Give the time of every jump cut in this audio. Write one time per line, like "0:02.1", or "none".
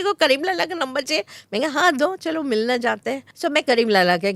0:03.2

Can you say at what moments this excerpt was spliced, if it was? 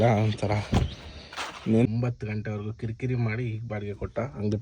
0:01.9

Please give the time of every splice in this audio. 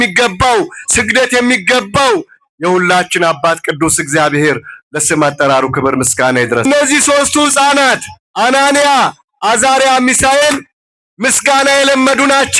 0:06.6

